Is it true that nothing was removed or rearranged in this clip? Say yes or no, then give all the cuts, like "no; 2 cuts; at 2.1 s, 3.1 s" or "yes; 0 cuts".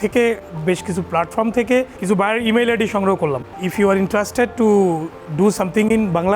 no; 2 cuts; at 1.9 s, 3.6 s